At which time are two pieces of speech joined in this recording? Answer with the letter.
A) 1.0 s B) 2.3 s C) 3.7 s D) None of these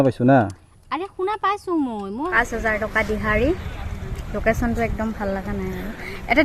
B